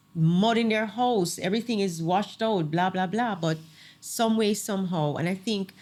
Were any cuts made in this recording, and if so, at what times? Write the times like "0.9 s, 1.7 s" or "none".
none